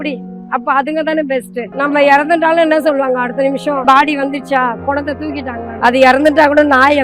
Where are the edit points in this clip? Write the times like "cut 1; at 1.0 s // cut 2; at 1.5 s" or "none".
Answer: cut 1; at 1.7 s // cut 2; at 3.8 s // cut 3; at 5.7 s